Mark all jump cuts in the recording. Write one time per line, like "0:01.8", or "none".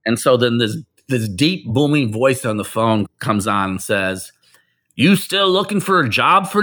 none